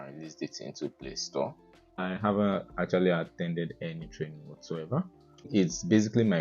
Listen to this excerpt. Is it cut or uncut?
cut